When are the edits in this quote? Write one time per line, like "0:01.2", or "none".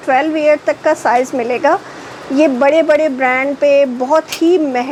none